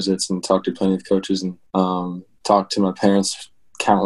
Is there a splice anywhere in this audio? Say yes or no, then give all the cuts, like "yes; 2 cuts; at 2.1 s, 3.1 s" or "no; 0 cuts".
yes; 1 cut; at 1.6 s